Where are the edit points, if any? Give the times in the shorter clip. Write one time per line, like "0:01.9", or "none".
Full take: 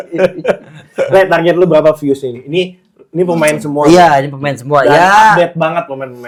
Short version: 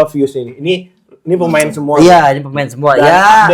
none